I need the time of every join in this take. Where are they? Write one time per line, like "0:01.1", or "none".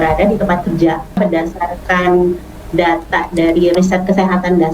0:01.2
0:03.8